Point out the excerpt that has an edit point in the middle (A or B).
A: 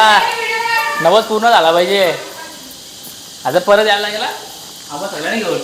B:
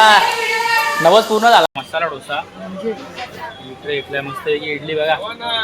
B